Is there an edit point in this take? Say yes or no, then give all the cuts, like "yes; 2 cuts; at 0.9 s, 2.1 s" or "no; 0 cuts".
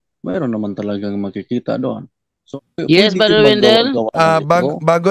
yes; 1 cut; at 2.4 s